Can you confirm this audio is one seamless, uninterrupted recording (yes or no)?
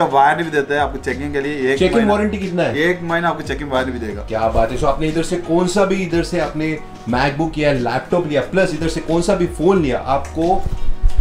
yes